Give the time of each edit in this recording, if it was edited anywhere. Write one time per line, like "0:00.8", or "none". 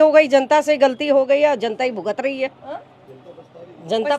none